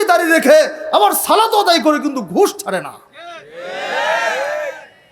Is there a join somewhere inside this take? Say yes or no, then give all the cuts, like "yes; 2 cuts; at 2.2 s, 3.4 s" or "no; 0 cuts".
no; 0 cuts